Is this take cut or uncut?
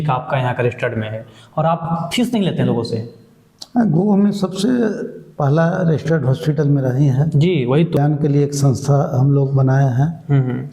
cut